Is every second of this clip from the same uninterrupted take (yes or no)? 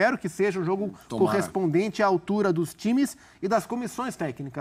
yes